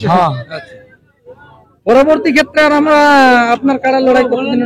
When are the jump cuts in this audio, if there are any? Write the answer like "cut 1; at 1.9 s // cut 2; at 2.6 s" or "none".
none